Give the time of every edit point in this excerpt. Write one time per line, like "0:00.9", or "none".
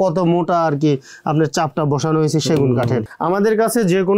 0:03.1